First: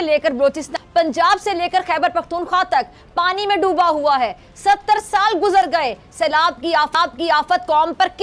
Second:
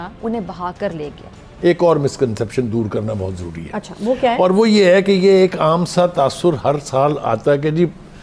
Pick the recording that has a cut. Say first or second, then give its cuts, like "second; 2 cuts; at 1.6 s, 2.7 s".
second; 1 cut; at 1.4 s